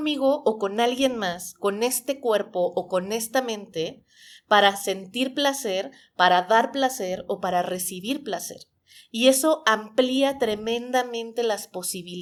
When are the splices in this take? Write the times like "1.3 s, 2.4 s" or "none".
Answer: none